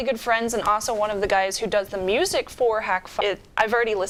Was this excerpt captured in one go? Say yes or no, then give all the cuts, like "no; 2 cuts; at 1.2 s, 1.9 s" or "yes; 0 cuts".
yes; 0 cuts